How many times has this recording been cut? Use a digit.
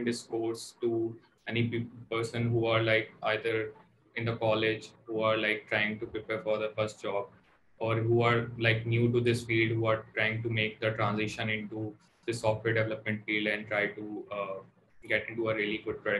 0